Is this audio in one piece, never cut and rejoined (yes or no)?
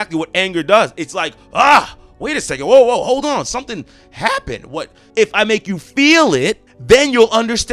no